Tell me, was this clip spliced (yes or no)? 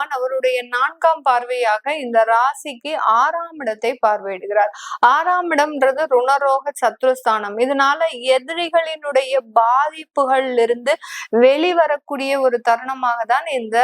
no